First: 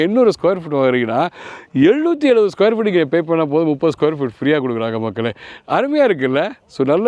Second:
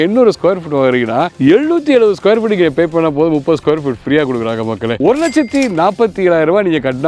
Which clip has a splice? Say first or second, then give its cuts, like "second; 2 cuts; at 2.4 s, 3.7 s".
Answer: second; 2 cuts; at 1.3 s, 5.0 s